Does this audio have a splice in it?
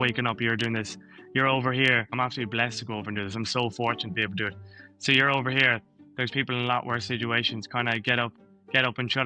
yes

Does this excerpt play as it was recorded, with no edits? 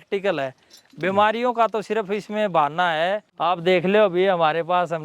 no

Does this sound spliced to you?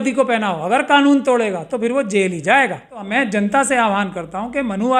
yes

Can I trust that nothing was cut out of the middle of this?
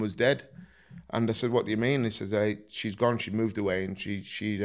yes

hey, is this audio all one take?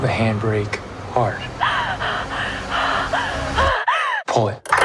yes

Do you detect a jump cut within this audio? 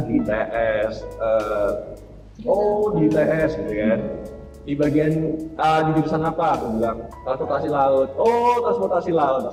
no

